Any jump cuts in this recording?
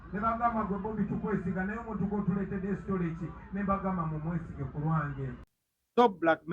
yes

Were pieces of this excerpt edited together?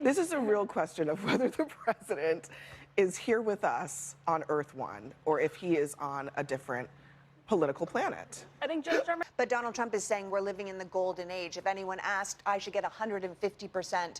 yes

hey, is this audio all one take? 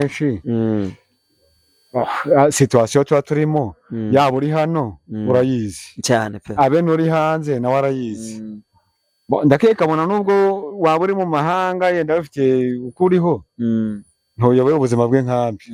yes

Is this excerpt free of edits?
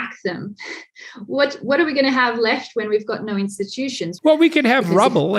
no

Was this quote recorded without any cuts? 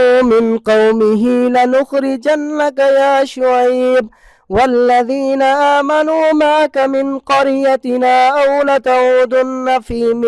yes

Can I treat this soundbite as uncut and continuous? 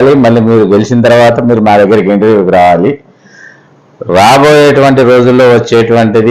yes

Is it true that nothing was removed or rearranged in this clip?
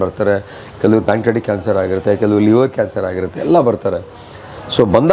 yes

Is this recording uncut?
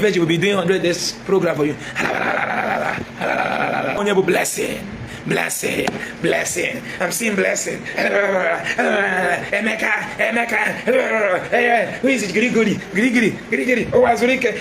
no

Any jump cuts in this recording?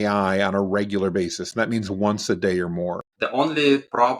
yes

